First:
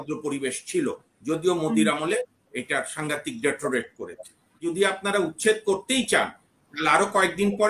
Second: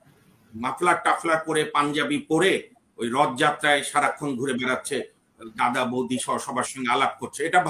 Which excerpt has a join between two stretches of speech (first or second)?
first